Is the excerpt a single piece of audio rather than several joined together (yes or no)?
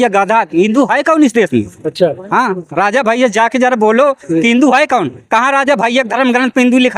yes